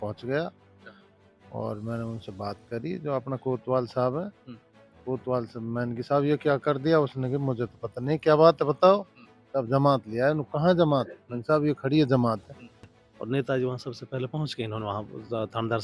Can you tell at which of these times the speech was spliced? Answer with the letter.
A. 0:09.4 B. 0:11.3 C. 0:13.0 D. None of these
C